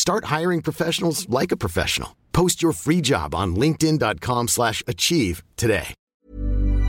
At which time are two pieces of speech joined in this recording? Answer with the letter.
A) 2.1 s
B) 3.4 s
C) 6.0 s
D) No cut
D